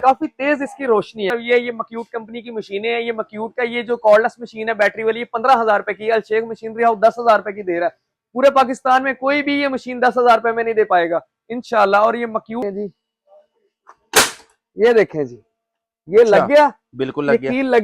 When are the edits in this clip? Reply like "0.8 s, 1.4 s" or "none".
1.3 s, 12.6 s